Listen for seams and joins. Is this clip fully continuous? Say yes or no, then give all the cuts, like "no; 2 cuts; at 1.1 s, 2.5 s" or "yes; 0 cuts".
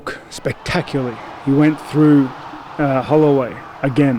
yes; 0 cuts